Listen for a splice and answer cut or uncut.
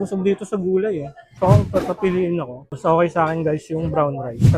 cut